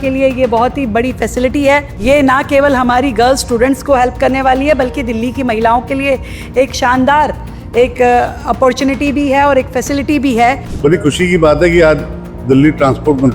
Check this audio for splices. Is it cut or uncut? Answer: cut